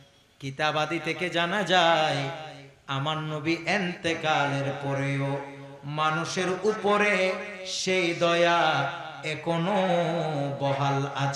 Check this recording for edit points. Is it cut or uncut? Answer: uncut